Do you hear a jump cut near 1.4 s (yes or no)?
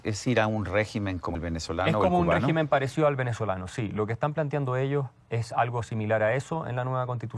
yes